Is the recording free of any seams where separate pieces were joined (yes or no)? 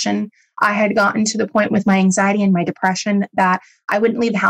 yes